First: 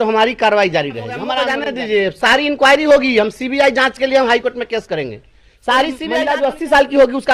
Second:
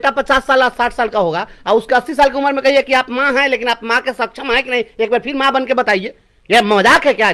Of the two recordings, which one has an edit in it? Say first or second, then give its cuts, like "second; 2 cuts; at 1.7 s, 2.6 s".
first; 2 cuts; at 1.7 s, 6.1 s